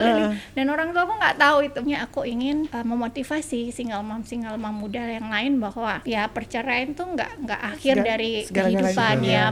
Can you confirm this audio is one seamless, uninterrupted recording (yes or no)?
no